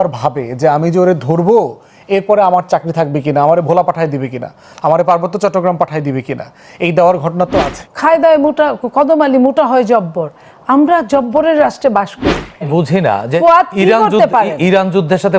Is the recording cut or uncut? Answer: cut